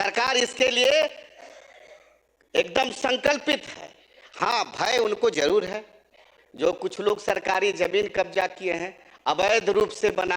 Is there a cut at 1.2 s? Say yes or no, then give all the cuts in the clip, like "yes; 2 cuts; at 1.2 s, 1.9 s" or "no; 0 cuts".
no; 0 cuts